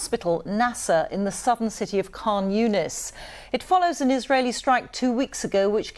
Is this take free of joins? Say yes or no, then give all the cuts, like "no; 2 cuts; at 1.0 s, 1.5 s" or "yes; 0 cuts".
yes; 0 cuts